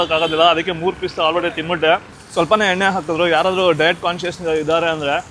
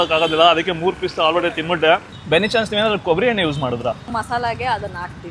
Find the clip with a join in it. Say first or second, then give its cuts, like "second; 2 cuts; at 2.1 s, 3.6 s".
second; 2 cuts; at 2.1 s, 4.2 s